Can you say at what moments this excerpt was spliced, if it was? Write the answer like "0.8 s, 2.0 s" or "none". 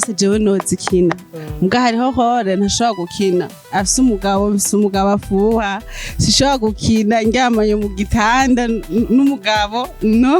3.6 s